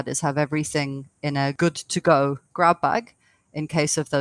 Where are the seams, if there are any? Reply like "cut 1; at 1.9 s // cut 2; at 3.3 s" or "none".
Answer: cut 1; at 1.5 s

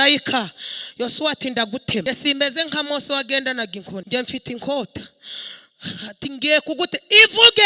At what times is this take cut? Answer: cut 1; at 2.0 s // cut 2; at 4.0 s

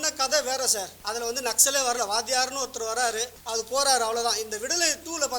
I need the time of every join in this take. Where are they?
cut 1; at 1.0 s // cut 2; at 3.4 s

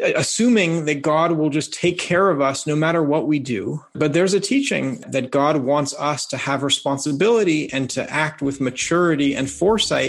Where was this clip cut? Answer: cut 1; at 3.9 s // cut 2; at 5.0 s

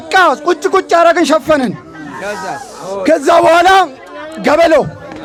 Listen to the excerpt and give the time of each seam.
none

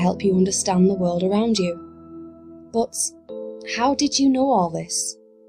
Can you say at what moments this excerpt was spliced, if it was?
none

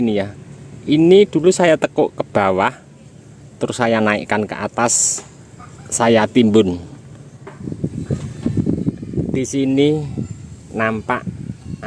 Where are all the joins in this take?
cut 1; at 7.7 s

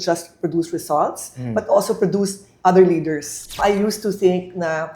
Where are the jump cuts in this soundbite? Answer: cut 1; at 3.5 s

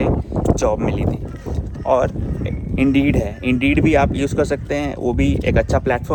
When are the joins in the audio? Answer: none

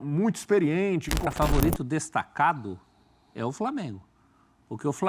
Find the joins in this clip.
cut 1; at 1.3 s

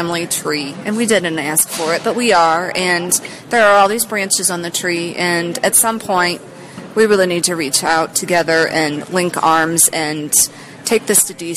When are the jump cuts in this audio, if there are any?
none

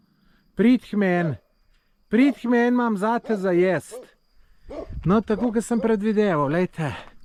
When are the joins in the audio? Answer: none

